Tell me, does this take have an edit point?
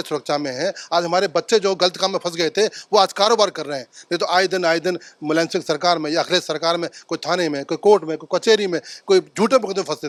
no; 0 cuts

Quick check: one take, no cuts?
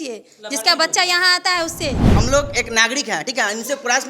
no; 1 cut; at 2.0 s

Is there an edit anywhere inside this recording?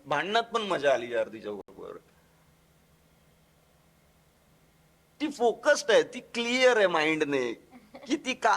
no; 0 cuts

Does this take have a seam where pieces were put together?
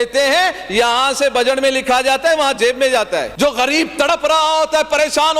yes; 1 cut; at 3.3 s

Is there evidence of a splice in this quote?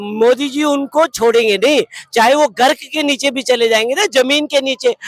no; 0 cuts

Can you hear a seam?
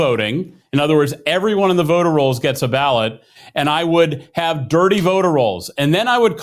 no; 0 cuts

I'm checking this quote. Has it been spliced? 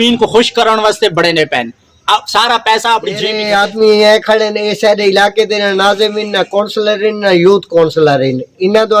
yes; 1 cut; at 3.4 s

